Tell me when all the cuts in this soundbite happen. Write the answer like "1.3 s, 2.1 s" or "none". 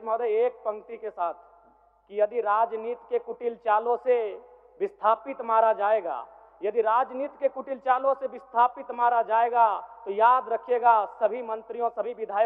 none